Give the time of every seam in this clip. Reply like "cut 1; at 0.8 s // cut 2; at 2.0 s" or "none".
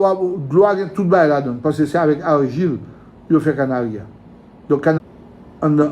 cut 1; at 5.0 s